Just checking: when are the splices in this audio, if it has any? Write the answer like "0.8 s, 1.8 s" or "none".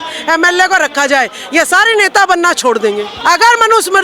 3.1 s